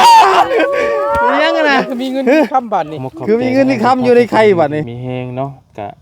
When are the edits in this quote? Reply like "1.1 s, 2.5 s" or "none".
4.9 s